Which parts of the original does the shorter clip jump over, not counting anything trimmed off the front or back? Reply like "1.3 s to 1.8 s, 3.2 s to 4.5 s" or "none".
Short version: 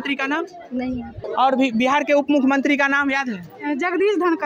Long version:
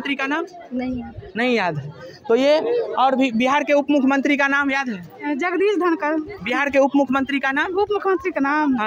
1.3 s to 2.9 s